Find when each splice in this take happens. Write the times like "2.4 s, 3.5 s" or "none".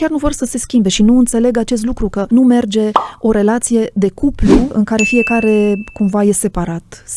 2.2 s, 4.7 s